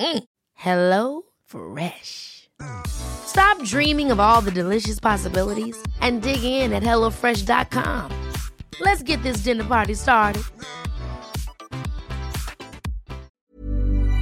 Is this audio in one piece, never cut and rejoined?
no; 1 cut; at 13.3 s

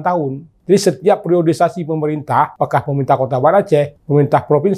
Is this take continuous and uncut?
yes; 0 cuts

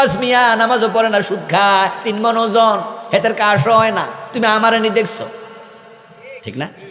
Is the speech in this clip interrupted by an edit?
no; 0 cuts

